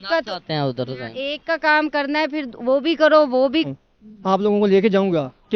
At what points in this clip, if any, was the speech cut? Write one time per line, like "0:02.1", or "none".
0:03.6